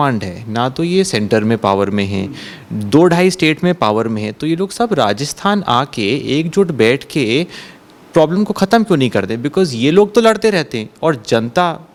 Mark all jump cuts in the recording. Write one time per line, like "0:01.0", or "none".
none